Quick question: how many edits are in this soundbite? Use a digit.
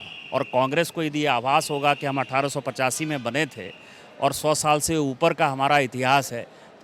0